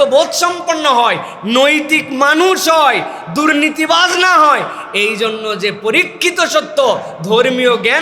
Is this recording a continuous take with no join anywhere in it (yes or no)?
yes